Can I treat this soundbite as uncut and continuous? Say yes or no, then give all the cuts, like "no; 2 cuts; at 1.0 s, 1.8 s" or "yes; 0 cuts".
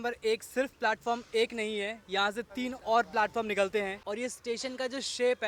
no; 1 cut; at 4.0 s